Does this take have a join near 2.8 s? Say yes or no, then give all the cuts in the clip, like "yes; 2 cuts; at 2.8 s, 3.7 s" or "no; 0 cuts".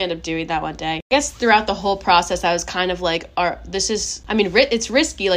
no; 2 cuts; at 1.1 s, 4.1 s